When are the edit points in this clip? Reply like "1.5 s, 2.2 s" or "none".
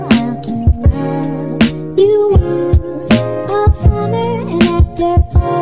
none